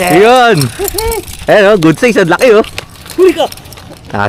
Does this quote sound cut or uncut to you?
uncut